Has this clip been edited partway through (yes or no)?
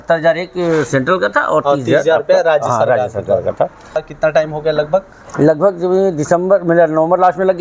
yes